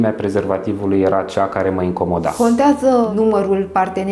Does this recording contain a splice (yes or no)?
yes